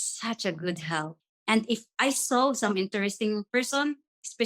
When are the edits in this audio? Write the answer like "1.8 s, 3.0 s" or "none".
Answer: 1.2 s